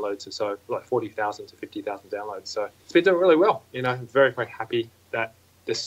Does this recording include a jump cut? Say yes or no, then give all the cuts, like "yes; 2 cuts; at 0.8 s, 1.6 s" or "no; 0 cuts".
yes; 1 cut; at 2.8 s